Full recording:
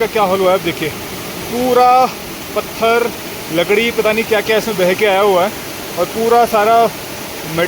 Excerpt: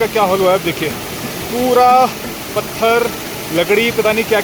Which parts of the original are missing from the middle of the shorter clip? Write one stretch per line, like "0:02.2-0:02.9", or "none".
none